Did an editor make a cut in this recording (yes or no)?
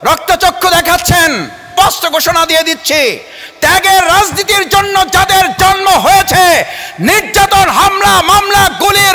yes